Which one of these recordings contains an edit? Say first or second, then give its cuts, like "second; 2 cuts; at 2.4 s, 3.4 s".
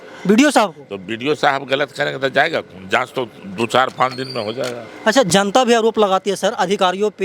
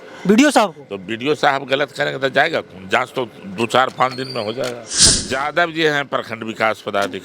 second; 1 cut; at 4.9 s